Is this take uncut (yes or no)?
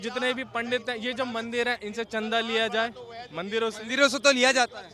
yes